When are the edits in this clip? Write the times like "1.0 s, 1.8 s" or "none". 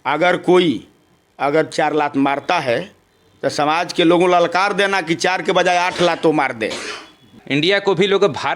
7.3 s